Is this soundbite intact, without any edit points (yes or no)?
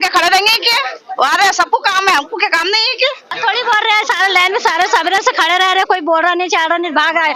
yes